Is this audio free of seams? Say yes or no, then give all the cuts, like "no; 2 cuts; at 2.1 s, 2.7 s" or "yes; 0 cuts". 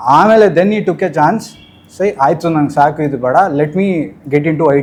yes; 0 cuts